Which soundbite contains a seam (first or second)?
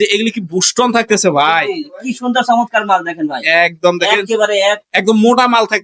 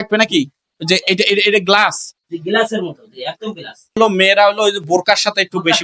second